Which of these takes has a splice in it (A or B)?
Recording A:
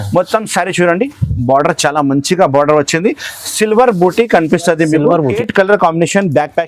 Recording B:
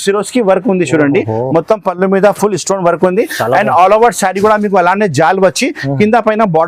A